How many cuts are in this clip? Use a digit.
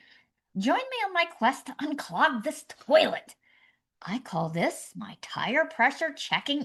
0